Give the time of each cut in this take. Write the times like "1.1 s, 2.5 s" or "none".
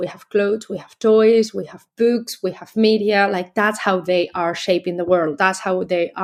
none